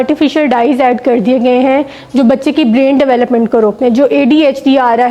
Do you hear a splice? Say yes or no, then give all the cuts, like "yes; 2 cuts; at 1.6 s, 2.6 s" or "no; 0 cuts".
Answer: no; 0 cuts